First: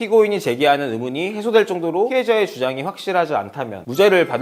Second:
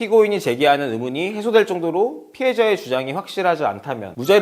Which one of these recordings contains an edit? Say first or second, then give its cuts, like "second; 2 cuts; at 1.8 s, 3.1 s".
first; 1 cut; at 2.1 s